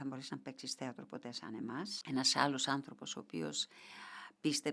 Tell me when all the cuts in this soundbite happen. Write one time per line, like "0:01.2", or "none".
0:01.9